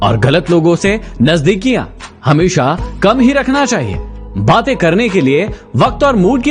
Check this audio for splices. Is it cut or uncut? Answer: uncut